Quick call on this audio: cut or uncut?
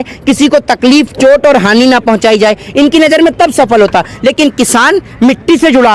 uncut